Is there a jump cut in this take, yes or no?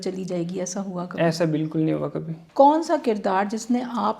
yes